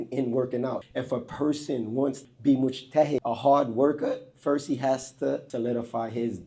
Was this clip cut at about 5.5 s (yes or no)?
yes